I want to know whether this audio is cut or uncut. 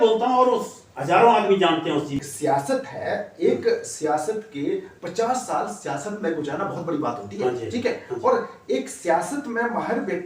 cut